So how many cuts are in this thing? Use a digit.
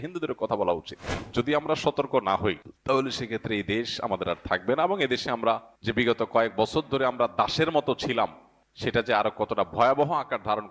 2